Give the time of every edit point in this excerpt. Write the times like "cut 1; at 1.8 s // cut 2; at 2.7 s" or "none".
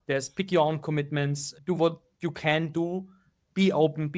cut 1; at 1.5 s